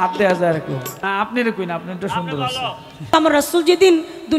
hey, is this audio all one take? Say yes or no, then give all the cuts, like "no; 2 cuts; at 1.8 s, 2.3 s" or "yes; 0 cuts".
no; 2 cuts; at 0.9 s, 3.1 s